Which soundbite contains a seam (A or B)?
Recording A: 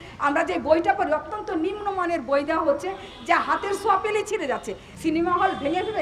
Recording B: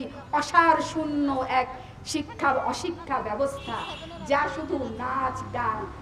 A